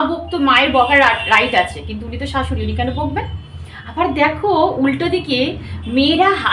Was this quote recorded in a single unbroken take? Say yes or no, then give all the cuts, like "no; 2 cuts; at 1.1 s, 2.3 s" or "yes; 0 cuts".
yes; 0 cuts